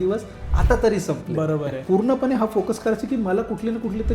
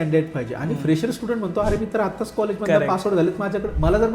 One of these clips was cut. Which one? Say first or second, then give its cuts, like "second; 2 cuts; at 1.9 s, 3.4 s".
first; 1 cut; at 1.8 s